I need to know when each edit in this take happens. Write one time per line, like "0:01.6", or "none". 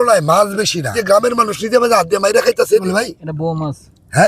0:01.0
0:02.8